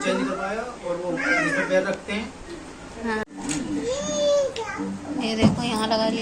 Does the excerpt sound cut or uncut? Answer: cut